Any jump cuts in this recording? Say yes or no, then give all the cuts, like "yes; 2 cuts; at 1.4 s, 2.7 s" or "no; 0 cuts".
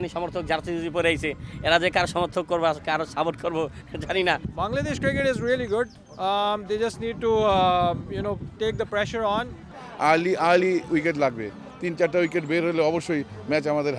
yes; 2 cuts; at 4.5 s, 9.8 s